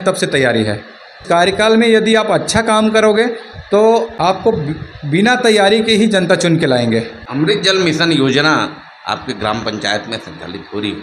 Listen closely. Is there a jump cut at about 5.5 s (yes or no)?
no